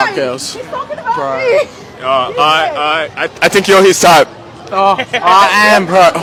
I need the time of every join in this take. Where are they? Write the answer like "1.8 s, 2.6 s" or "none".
none